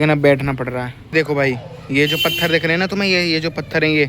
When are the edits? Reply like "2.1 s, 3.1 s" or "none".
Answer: 1.1 s

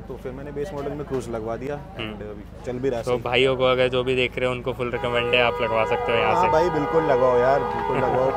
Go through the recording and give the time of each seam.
none

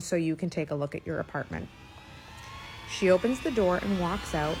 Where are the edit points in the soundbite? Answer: none

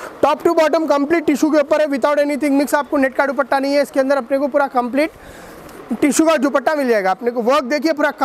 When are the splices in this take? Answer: none

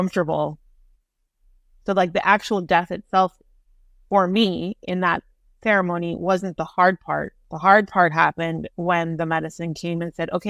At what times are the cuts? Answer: 7.4 s

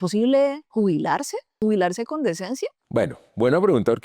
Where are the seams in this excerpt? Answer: 1.0 s

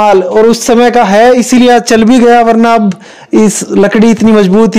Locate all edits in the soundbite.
none

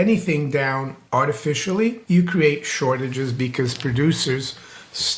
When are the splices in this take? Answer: 0.9 s, 2.0 s

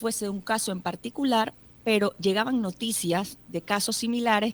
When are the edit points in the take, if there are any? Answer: none

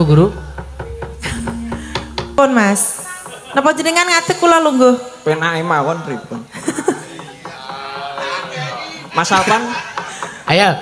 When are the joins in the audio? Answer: 2.3 s

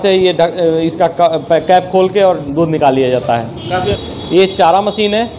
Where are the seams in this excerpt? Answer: 4.0 s

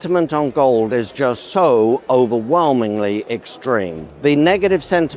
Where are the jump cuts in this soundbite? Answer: 1.4 s, 4.0 s

